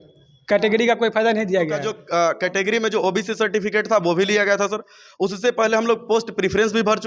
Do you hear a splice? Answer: yes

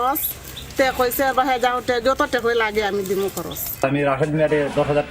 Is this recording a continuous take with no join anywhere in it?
no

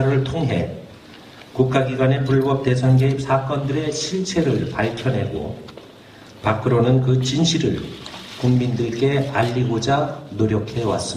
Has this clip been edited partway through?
yes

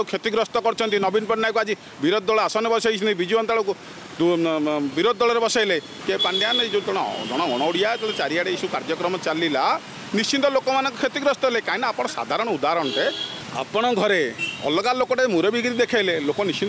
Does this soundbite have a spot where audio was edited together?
yes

